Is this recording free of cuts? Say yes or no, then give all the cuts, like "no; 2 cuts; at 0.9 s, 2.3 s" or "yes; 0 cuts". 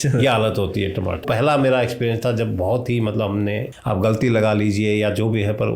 no; 2 cuts; at 1.2 s, 3.7 s